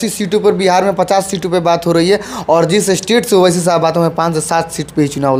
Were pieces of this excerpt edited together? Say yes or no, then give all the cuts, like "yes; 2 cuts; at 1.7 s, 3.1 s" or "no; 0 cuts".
no; 0 cuts